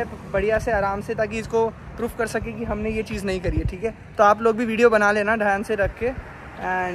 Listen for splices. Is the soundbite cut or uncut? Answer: uncut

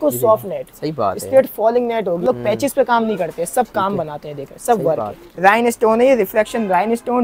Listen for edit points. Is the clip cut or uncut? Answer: cut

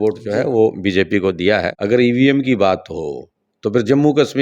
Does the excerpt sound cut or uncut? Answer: cut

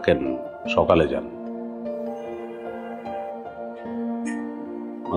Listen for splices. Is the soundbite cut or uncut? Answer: uncut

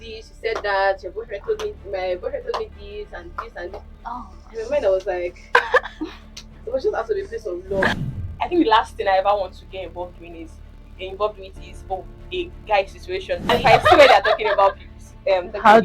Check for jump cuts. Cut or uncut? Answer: cut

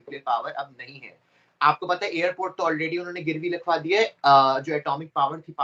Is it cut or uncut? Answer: uncut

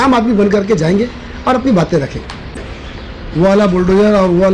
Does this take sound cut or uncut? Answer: uncut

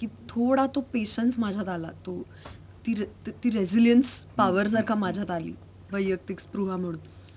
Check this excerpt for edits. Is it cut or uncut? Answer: uncut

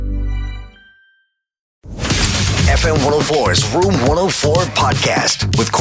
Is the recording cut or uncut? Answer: cut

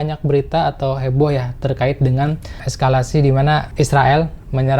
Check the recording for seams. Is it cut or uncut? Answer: cut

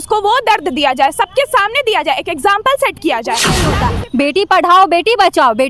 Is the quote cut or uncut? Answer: cut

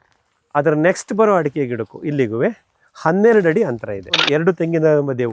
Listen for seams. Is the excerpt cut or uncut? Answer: cut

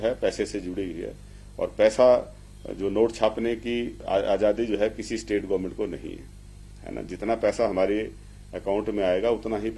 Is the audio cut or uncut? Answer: cut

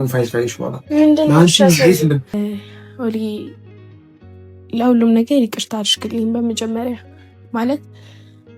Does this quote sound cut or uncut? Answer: cut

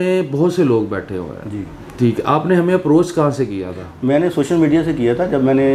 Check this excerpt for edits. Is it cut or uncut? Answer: uncut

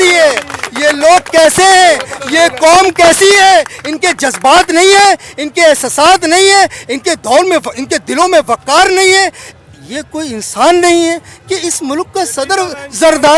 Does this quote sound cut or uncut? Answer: uncut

